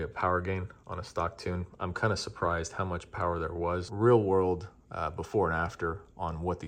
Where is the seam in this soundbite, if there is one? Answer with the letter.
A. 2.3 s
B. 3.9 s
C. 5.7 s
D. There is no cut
B